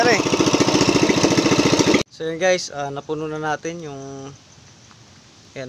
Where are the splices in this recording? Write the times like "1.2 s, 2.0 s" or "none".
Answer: 2.0 s

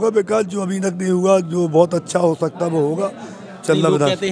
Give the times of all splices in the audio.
none

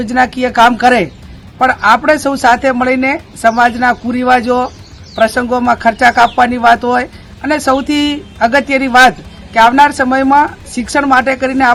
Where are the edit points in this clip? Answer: none

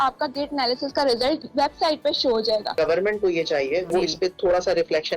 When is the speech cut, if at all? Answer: 1.5 s, 2.7 s, 3.9 s

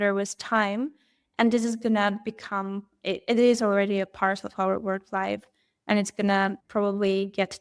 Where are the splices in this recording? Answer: 6.6 s

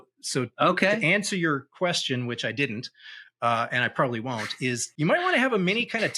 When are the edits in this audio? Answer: 4.9 s

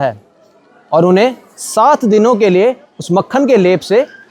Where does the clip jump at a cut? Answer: none

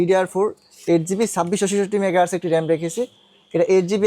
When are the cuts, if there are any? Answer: none

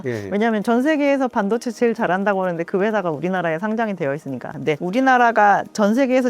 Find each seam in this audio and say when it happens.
4.5 s

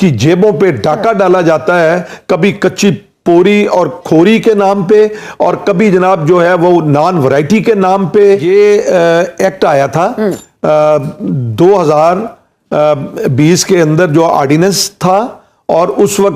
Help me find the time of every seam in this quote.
8.4 s

